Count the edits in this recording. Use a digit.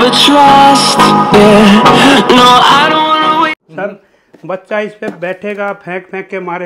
1